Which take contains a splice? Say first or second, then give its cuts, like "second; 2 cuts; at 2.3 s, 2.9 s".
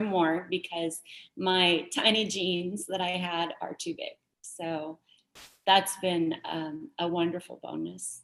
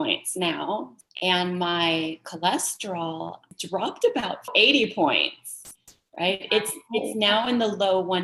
second; 3 cuts; at 1.0 s, 3.5 s, 4.5 s